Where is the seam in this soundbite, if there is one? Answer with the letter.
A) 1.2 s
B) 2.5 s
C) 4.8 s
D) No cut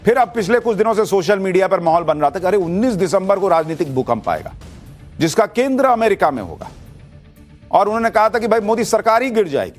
B